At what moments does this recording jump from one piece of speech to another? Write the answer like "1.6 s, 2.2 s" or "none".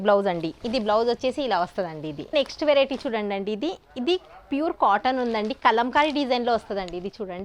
2.2 s